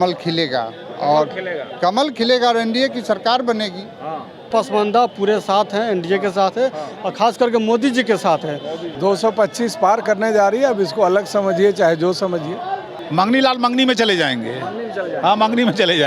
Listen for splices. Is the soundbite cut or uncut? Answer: cut